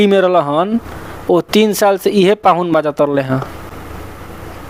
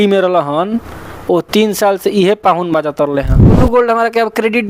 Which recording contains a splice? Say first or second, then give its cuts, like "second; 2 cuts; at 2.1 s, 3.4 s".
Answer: second; 1 cut; at 3.6 s